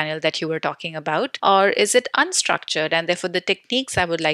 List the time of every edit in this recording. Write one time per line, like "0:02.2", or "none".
0:01.3